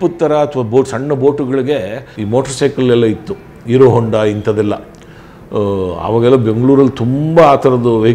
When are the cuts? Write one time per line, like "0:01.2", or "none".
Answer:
0:02.1